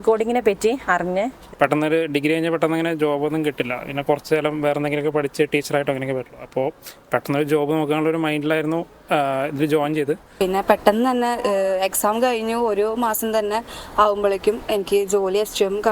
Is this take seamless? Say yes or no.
no